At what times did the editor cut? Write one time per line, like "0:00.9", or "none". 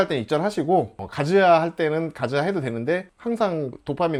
none